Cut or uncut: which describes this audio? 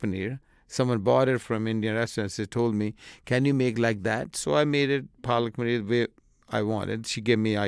cut